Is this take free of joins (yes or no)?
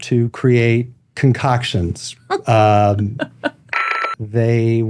no